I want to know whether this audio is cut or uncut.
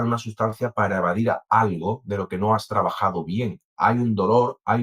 uncut